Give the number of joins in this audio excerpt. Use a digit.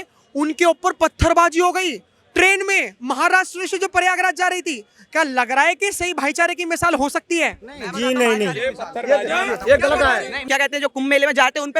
1